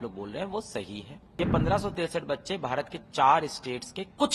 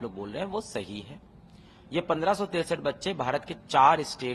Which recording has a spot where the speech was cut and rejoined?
first; 1 cut; at 1.2 s

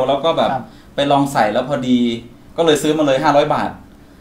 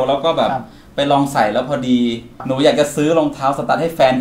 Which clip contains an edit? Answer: second; 1 cut; at 2.3 s

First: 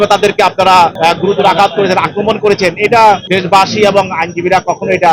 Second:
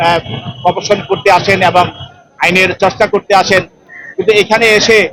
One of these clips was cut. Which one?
first; 2 cuts; at 0.9 s, 3.2 s

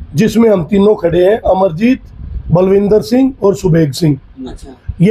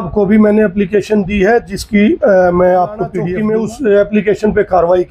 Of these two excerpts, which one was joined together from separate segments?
second; 1 cut; at 3.2 s

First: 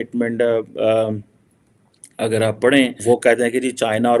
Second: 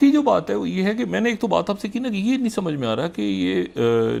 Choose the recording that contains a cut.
first; 1 cut; at 3.0 s

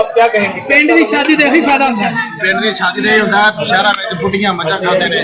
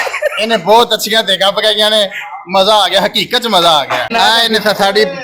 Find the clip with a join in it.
second; 1 cut; at 4.1 s

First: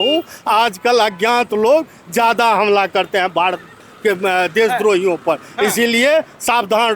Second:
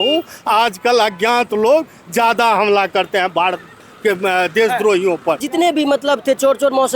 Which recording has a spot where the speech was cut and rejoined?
second; 1 cut; at 5.4 s

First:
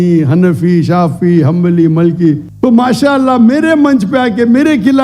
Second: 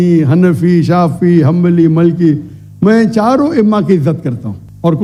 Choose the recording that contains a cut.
first; 1 cut; at 2.5 s

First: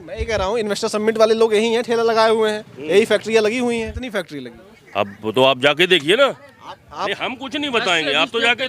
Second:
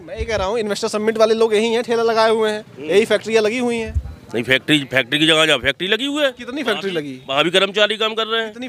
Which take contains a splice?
first; 1 cut; at 4.0 s

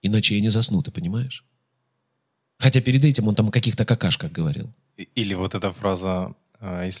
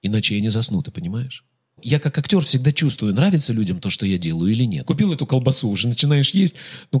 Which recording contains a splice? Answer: second; 2 cuts; at 1.8 s, 4.8 s

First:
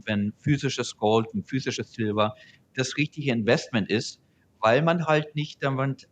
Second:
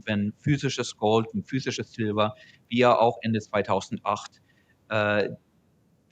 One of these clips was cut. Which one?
first; 1 cut; at 2.5 s

